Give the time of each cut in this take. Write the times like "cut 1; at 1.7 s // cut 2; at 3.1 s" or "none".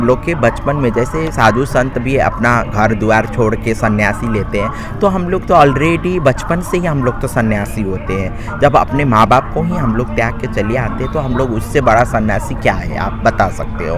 none